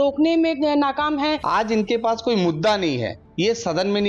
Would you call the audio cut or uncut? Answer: cut